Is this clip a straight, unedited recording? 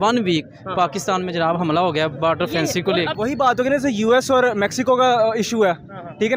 no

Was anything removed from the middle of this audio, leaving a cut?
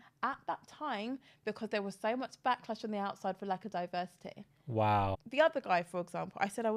yes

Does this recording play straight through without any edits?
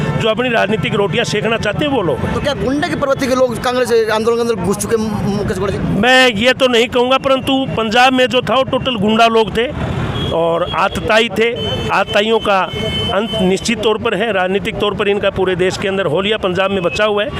yes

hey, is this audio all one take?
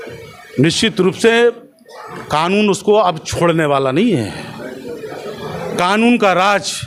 yes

